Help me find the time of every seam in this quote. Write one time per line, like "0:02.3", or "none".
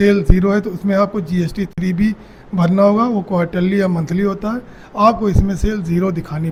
none